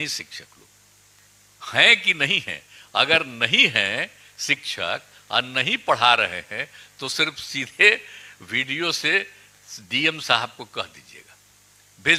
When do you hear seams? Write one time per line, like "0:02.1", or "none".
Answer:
none